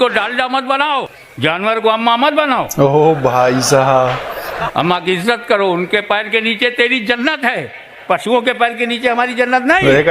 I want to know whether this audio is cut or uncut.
cut